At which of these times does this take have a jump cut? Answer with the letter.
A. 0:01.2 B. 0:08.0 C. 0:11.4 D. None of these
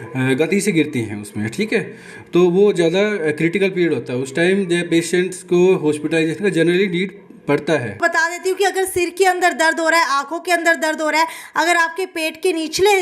B